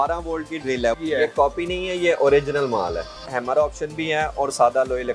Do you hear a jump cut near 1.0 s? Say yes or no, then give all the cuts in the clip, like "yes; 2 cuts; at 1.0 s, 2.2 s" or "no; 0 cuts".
yes; 2 cuts; at 1.0 s, 3.3 s